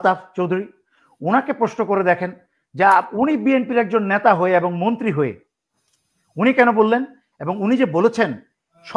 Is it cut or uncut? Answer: uncut